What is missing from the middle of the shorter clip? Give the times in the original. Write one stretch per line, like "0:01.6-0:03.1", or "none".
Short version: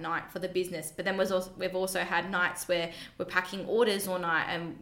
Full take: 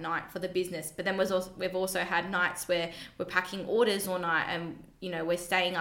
none